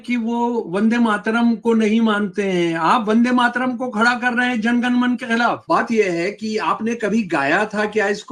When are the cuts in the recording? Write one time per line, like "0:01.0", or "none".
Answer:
0:05.6